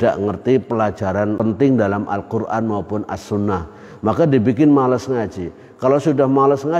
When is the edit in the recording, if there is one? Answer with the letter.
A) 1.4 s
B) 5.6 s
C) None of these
A